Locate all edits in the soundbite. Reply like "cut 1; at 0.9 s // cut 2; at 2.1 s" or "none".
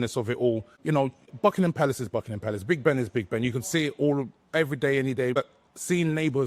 cut 1; at 1.0 s // cut 2; at 5.4 s

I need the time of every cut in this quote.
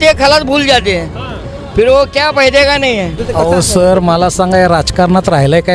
cut 1; at 3.2 s

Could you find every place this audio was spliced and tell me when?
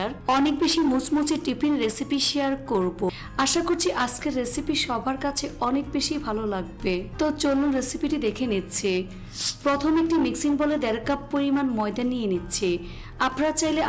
cut 1; at 3.2 s

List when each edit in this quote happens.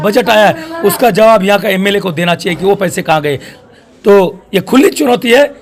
none

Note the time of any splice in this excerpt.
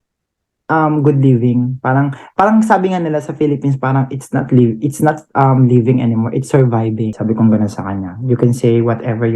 cut 1; at 7.1 s

